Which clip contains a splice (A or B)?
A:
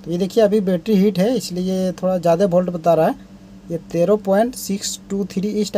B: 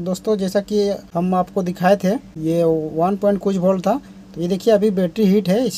B